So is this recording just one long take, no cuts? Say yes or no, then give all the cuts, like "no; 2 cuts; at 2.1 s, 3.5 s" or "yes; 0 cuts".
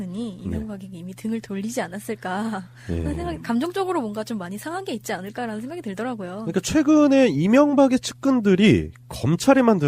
yes; 0 cuts